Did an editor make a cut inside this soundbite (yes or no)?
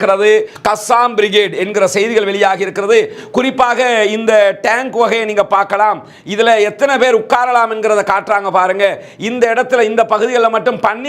no